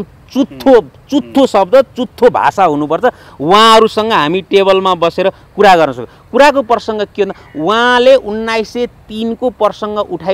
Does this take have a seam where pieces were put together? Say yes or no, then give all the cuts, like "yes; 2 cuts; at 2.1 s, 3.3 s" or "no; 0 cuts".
no; 0 cuts